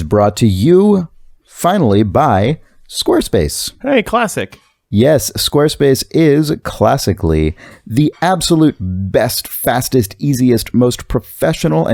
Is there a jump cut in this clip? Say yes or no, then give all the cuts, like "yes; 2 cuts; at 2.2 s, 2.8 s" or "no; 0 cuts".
no; 0 cuts